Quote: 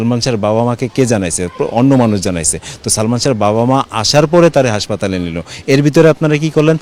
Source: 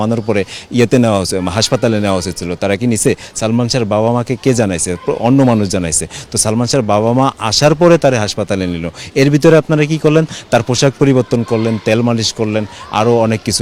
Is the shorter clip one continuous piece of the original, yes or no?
yes